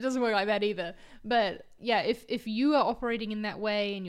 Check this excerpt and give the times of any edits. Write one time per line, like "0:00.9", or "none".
0:01.7